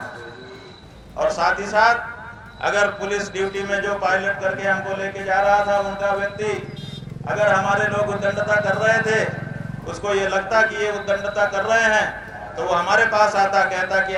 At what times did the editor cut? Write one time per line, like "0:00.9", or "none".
none